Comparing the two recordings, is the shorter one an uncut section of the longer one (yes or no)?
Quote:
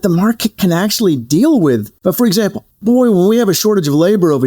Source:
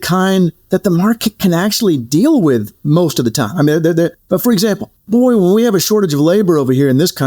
no